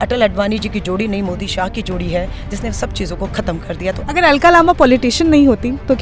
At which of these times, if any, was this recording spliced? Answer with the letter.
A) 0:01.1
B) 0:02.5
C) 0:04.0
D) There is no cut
C